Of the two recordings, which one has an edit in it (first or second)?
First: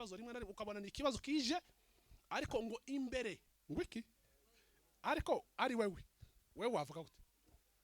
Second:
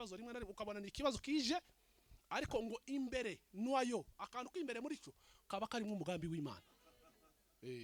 first